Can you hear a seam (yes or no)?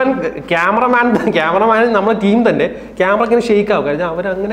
no